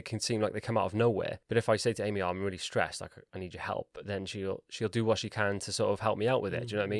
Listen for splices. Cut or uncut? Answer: cut